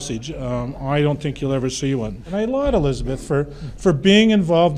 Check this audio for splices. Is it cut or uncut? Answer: uncut